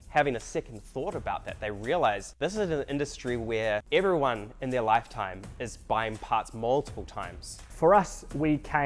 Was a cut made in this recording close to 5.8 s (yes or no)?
no